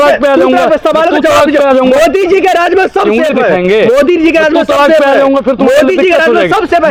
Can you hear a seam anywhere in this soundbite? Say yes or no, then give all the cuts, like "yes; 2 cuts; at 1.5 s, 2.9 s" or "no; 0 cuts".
no; 0 cuts